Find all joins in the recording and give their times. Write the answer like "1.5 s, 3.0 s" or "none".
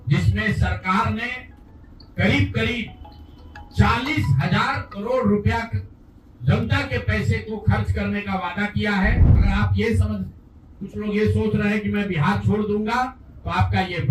9.3 s